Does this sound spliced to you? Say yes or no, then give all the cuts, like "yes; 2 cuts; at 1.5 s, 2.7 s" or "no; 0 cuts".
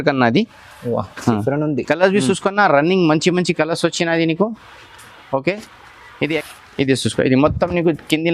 yes; 1 cut; at 6.4 s